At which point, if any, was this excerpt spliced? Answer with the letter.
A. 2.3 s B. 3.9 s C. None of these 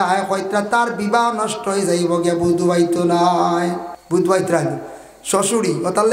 B